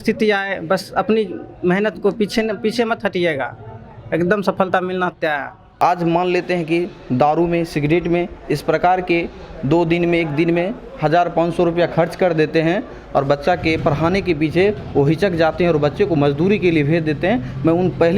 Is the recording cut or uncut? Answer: cut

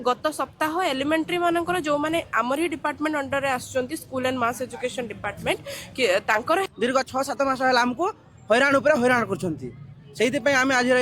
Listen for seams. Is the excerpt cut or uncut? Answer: cut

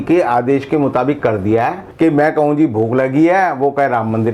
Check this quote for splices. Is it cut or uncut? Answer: cut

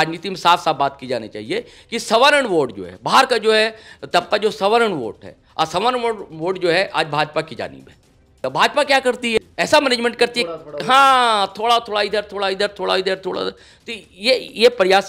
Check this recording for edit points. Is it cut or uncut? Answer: cut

